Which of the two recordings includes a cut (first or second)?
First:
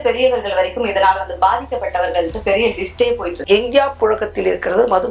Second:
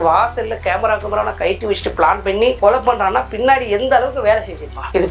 first